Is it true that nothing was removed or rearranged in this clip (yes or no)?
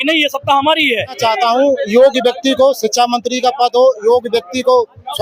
no